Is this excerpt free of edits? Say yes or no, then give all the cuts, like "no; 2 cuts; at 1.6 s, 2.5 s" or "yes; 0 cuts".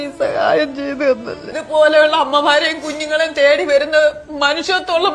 no; 1 cut; at 1.5 s